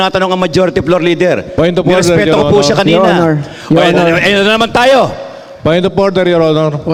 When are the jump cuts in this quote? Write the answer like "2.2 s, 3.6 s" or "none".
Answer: none